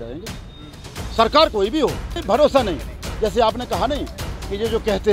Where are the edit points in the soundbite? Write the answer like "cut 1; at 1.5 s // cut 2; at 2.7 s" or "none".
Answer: none